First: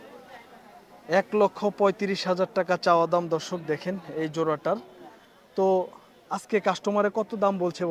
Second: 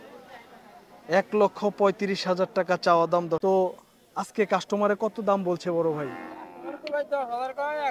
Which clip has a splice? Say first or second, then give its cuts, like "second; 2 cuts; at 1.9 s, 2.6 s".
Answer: second; 1 cut; at 3.4 s